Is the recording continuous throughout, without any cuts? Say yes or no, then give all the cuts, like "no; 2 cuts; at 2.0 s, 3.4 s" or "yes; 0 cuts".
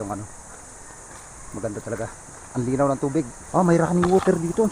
no; 1 cut; at 3.4 s